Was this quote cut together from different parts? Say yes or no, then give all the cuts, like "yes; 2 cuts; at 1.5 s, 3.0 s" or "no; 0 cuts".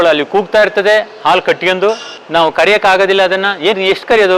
no; 0 cuts